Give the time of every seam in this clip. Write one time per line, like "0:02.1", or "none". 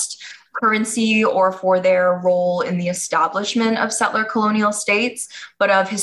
none